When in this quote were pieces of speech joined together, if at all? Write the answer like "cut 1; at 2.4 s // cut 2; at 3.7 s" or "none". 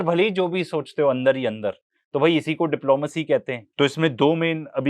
cut 1; at 3.6 s